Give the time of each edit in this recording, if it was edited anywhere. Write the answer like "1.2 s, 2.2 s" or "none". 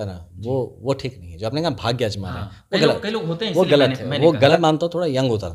4.5 s